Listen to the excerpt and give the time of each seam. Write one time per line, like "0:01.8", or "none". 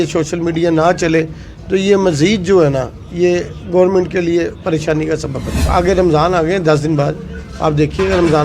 0:05.7

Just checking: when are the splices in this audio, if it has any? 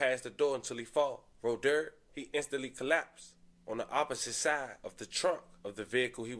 none

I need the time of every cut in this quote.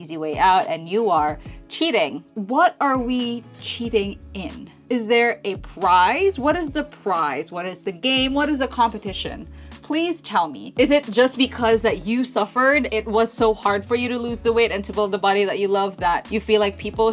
0:02.3
0:04.8
0:10.6
0:12.9

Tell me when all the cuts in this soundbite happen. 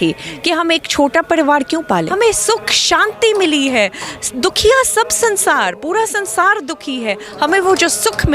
0:02.1

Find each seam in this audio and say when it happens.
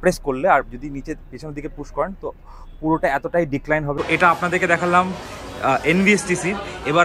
0:03.9

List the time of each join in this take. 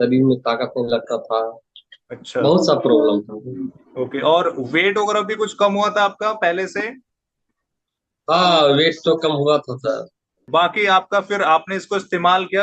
none

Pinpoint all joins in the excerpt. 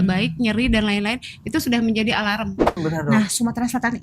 0:02.8

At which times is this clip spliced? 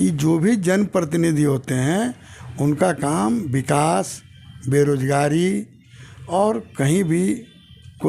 none

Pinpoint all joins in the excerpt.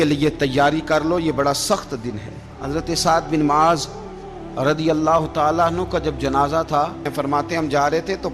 0:02.5
0:07.1

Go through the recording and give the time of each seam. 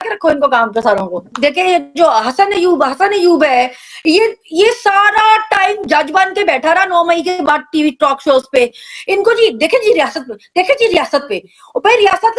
0:01.3

